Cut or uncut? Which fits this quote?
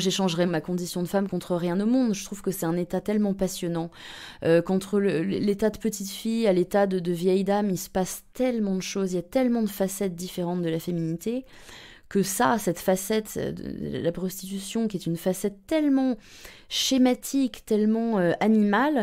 cut